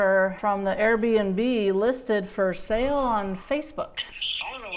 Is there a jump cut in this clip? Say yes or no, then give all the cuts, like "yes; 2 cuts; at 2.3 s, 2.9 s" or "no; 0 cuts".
no; 0 cuts